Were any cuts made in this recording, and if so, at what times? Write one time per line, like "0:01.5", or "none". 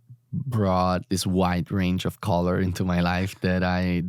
0:01.0